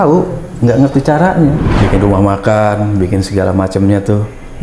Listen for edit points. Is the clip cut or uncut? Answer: cut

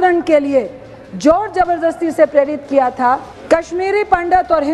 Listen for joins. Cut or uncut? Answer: cut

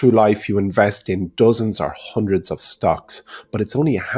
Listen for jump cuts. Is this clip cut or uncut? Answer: uncut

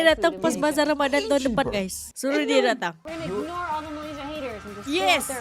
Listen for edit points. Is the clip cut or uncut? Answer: cut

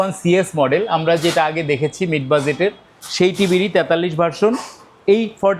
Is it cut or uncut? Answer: uncut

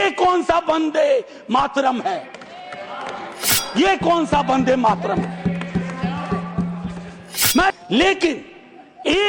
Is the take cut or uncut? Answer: cut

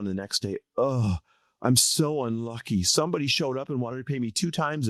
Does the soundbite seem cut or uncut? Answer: uncut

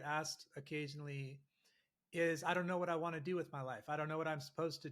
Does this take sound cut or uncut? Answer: uncut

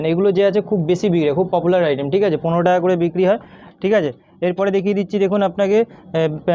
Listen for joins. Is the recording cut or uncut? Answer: uncut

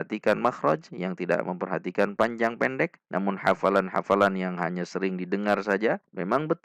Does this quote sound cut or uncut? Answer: uncut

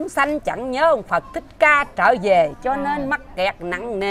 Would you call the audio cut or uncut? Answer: uncut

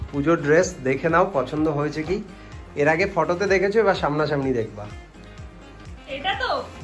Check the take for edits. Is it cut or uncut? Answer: uncut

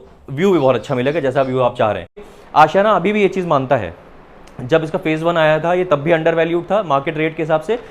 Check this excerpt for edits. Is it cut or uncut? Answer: cut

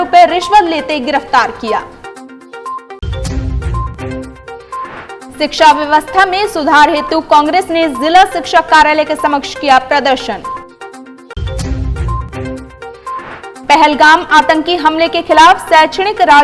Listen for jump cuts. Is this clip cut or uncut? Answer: uncut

